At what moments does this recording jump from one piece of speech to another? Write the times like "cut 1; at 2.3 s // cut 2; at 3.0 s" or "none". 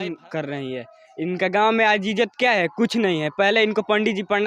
none

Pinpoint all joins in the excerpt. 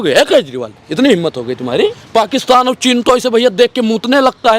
cut 1; at 2.0 s

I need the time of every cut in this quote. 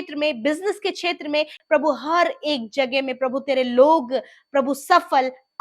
cut 1; at 1.5 s

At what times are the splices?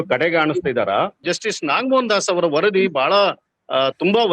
cut 1; at 1.2 s

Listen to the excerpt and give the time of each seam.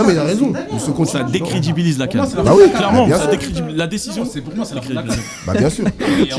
none

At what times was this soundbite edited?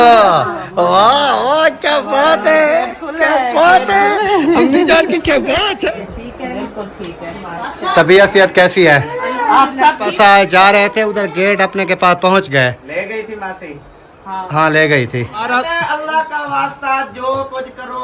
cut 1; at 6.0 s // cut 2; at 10.1 s // cut 3; at 15.5 s

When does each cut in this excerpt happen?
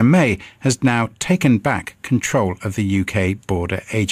cut 1; at 2.2 s

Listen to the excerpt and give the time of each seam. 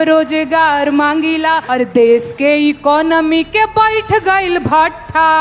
cut 1; at 1.6 s

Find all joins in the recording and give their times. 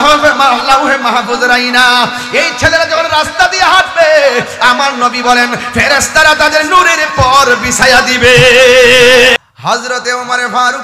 cut 1; at 9.3 s

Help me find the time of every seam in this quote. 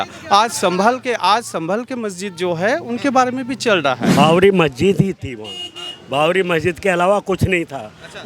cut 1; at 4.1 s

